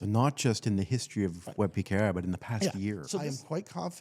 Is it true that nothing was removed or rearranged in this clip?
no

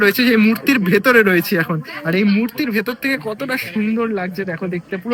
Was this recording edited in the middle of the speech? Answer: no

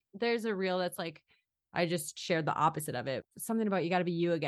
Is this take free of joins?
no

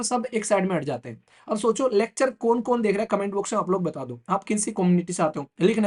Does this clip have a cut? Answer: no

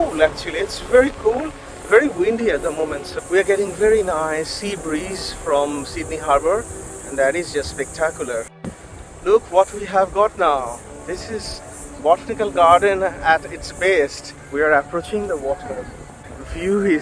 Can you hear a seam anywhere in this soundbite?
no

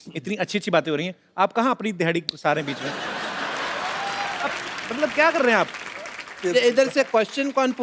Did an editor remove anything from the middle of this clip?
no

